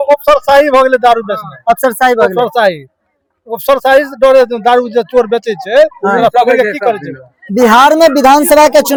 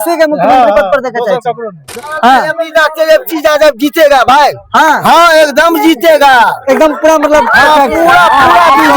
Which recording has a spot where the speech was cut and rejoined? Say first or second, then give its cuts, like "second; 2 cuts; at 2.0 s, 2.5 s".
second; 1 cut; at 1.9 s